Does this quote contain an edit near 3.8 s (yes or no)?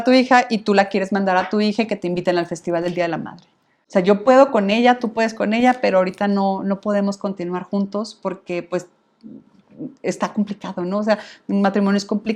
yes